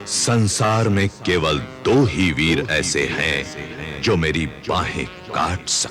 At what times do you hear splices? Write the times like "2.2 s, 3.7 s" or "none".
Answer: none